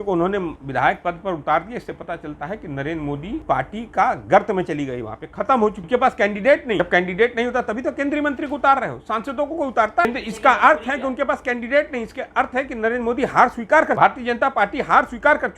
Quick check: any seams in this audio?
yes; 5 cuts; at 3.4 s, 5.8 s, 6.8 s, 10.0 s, 14.0 s

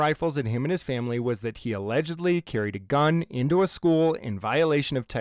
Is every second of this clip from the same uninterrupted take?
yes; 0 cuts

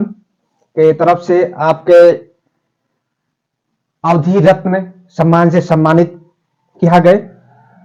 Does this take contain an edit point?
no; 0 cuts

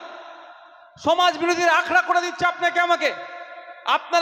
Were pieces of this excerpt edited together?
no; 0 cuts

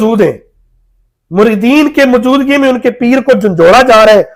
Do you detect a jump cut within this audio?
no; 0 cuts

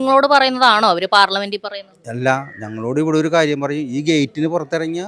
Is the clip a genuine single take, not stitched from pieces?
yes; 0 cuts

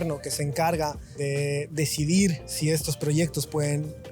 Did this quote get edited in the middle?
yes; 2 cuts; at 1.1 s, 2.5 s

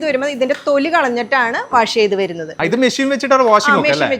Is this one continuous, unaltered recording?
no; 1 cut; at 2.5 s

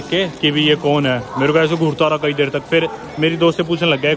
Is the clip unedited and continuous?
yes; 0 cuts

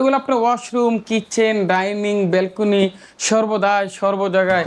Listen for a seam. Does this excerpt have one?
no; 0 cuts

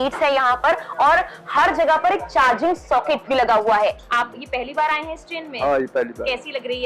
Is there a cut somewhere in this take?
yes; 1 cut; at 4.0 s

